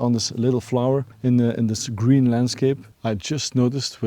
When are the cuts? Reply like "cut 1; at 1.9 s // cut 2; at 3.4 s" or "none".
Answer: none